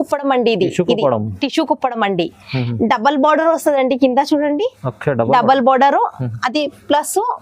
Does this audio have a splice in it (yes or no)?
no